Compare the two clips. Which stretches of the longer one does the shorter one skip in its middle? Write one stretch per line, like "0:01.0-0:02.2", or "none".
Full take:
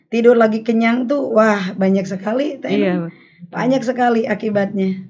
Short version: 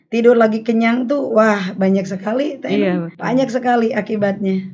0:03.1-0:03.5